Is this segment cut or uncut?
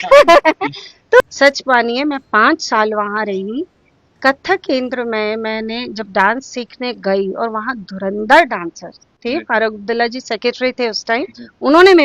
cut